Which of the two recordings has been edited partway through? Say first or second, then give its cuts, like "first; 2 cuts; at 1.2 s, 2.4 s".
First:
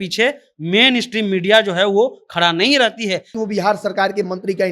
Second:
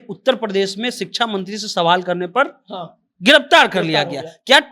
first; 1 cut; at 3.3 s